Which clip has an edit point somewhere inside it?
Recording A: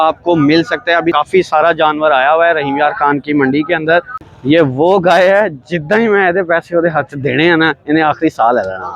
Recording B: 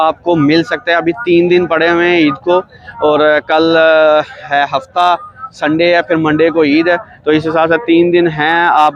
A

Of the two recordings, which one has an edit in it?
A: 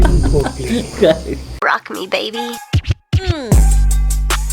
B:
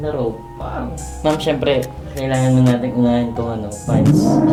A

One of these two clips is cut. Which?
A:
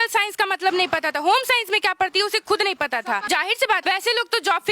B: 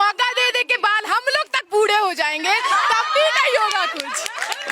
A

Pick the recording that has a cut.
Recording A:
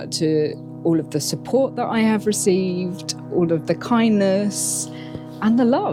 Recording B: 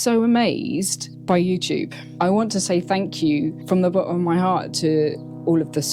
B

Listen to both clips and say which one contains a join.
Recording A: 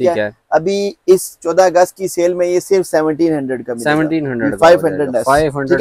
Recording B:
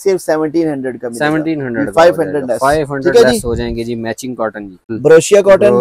B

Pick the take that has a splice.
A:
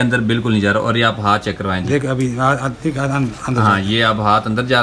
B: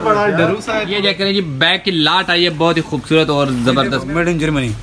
B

